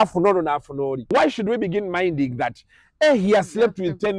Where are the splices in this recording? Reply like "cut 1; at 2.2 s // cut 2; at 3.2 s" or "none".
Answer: cut 1; at 1.1 s